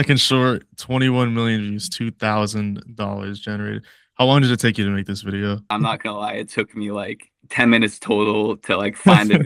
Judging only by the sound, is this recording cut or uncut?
uncut